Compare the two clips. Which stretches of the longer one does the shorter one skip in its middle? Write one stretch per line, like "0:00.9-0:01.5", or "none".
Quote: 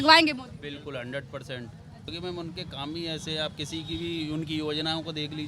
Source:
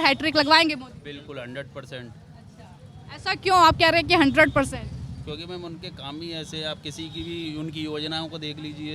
0:02.5-0:05.4